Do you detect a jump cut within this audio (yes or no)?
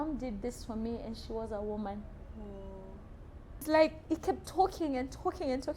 yes